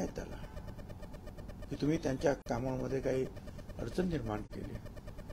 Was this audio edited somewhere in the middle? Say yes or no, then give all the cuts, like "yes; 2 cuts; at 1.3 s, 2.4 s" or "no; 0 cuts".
no; 0 cuts